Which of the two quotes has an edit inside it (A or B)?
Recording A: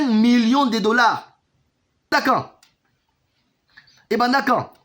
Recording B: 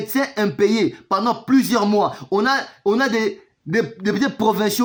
A